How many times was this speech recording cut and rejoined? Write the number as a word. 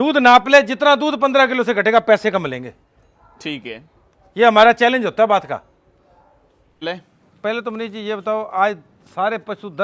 one